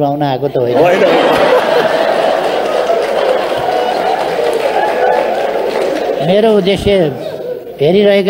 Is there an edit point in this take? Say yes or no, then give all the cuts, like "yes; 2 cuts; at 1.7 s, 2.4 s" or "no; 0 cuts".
no; 0 cuts